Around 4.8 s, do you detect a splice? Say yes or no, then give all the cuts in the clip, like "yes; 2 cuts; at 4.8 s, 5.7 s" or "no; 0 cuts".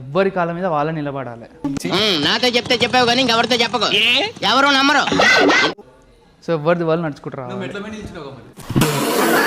no; 0 cuts